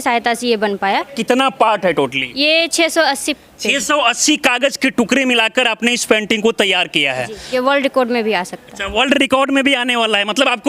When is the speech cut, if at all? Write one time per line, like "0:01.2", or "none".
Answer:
0:01.2
0:02.2
0:07.4